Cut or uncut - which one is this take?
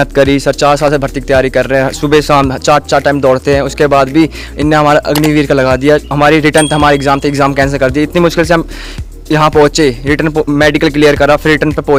uncut